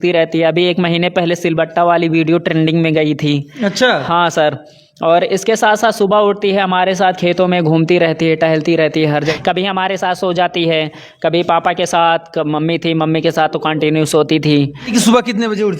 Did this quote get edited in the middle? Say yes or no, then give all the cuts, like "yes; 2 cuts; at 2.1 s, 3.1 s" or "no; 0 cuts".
yes; 2 cuts; at 9.3 s, 14.9 s